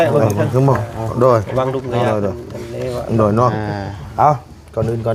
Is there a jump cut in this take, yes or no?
no